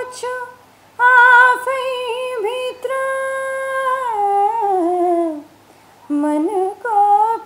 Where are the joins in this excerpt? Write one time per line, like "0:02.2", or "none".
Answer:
none